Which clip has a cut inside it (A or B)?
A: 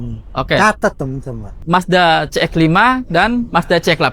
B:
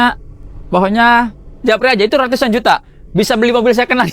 A